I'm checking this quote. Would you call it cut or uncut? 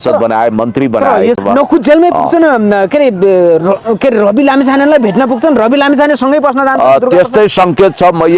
cut